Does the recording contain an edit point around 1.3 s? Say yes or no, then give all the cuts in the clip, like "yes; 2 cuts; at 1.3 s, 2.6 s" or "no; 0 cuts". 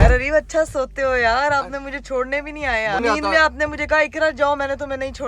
no; 1 cut; at 3.0 s